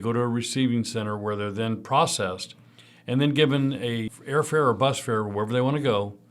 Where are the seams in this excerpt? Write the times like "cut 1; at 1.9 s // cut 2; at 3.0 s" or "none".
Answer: cut 1; at 4.1 s